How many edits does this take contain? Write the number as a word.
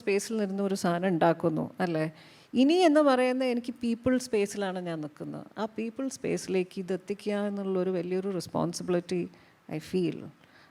zero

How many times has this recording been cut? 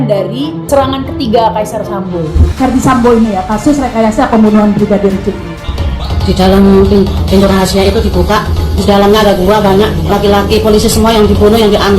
two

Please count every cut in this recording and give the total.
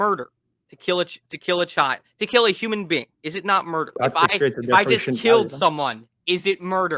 one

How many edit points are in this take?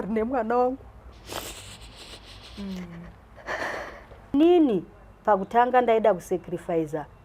one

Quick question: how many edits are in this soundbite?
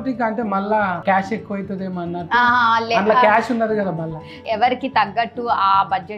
one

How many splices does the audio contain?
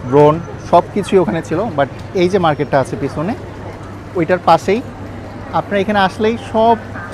zero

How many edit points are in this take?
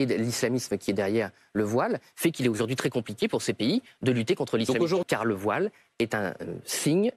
one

